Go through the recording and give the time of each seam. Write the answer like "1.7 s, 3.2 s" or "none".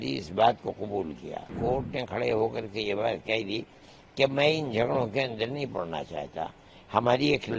1.5 s

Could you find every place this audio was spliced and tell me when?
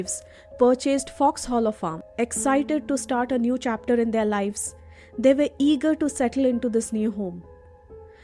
2.0 s

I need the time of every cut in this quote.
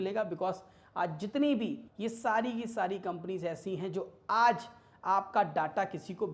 1.9 s

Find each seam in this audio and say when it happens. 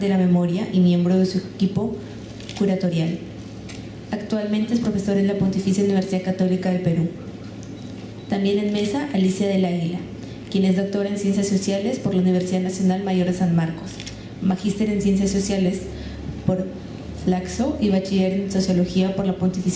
7.2 s

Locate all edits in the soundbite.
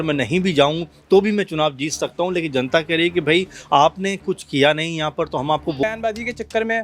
5.8 s

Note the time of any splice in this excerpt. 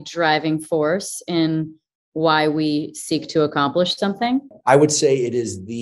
4.5 s

